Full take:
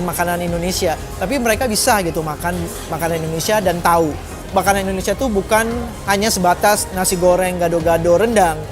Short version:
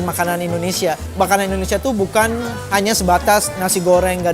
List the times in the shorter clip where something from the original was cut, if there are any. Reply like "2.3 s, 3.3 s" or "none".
1.0 s